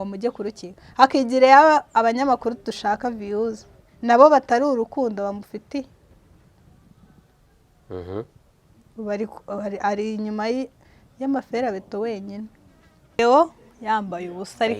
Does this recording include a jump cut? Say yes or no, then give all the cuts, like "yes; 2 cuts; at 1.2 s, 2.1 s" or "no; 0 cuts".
yes; 1 cut; at 13.2 s